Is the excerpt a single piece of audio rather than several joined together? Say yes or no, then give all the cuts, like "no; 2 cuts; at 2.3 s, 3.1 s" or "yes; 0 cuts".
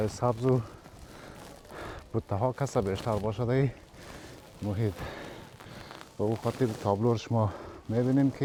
yes; 0 cuts